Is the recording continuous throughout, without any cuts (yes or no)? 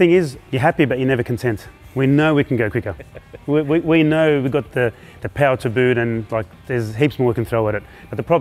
yes